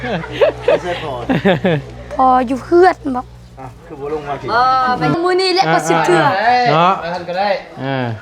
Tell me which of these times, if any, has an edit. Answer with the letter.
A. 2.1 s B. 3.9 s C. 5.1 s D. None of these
C